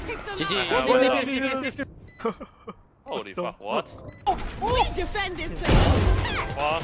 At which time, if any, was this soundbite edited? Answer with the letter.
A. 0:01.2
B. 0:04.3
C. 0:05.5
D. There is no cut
B